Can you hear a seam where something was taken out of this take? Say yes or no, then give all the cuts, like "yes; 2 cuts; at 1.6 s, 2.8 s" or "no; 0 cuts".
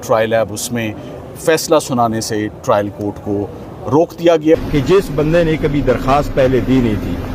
yes; 1 cut; at 4.6 s